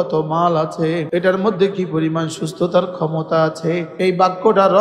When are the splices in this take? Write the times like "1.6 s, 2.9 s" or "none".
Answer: 1.1 s, 3.9 s